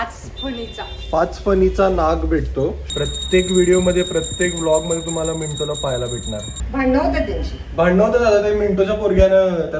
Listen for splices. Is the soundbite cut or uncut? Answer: cut